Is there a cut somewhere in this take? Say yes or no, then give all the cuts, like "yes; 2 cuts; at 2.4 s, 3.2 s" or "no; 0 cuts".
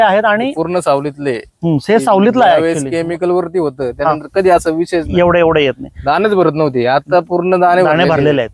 no; 0 cuts